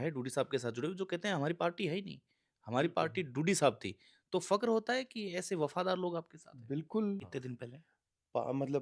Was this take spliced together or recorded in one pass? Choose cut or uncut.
cut